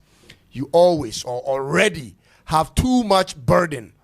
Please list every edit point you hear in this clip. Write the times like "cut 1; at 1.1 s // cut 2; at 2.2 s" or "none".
none